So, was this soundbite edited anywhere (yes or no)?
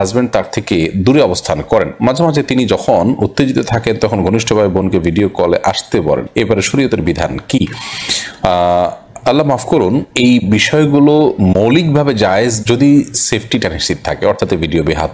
no